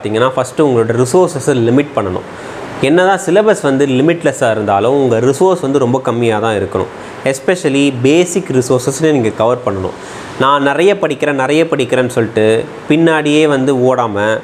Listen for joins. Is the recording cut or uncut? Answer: uncut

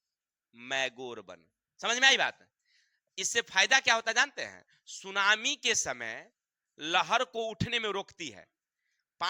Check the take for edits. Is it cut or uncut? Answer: uncut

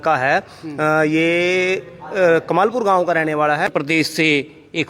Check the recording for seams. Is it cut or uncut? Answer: cut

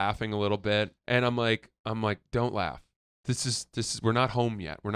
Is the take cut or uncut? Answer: cut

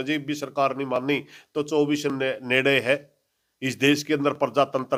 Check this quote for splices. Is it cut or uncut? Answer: uncut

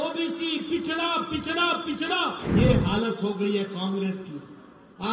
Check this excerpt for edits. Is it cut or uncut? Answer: cut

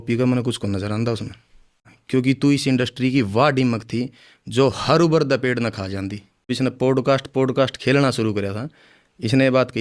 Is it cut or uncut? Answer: cut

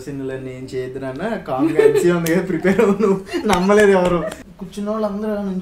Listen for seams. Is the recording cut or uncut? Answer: cut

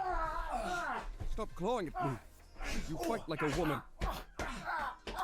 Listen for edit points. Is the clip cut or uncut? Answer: cut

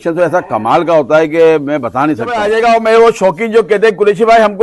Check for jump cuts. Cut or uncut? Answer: cut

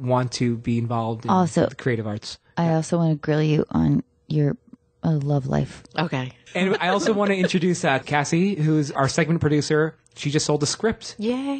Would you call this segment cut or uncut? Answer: cut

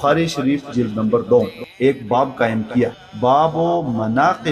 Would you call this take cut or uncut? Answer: cut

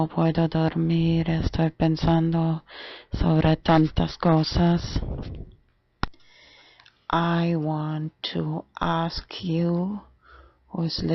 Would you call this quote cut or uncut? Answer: cut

